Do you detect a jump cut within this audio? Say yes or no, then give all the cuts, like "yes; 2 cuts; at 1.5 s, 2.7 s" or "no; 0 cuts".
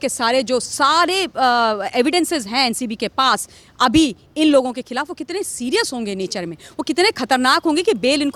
no; 0 cuts